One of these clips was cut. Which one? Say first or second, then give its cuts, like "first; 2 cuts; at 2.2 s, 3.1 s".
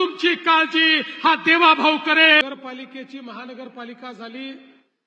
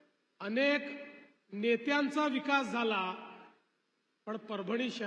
first; 1 cut; at 2.4 s